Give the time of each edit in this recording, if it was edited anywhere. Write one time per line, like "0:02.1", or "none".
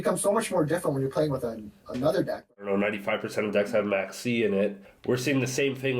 0:02.5
0:04.9